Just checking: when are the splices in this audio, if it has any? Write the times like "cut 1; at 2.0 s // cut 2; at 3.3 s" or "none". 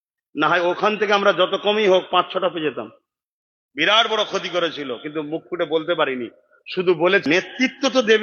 cut 1; at 7.2 s